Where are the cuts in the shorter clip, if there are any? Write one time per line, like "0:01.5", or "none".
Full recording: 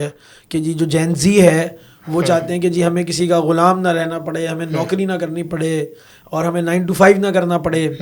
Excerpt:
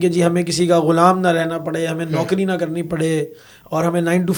none